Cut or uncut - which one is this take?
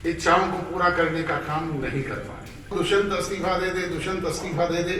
cut